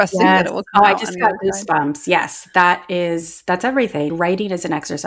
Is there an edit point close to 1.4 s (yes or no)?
no